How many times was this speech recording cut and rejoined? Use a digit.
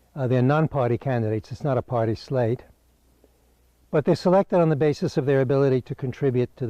1